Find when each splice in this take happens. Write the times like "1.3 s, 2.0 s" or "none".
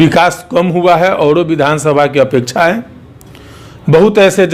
none

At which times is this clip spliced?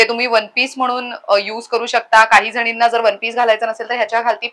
none

